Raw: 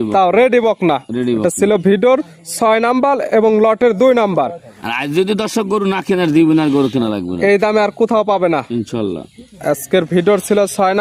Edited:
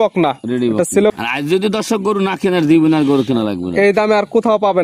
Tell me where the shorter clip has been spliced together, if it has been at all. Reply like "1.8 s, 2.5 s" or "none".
1.1 s